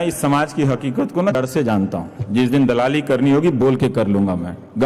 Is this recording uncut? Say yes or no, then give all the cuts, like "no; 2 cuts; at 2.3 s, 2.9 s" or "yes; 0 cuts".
no; 1 cut; at 1.4 s